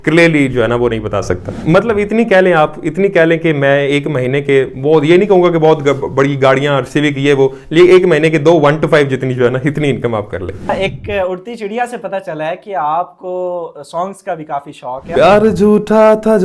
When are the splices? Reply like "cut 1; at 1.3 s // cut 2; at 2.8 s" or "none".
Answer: cut 1; at 1.5 s // cut 2; at 10.7 s // cut 3; at 15.2 s